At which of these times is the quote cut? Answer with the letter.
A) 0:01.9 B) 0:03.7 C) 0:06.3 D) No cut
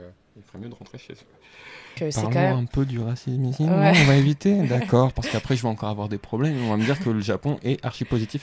A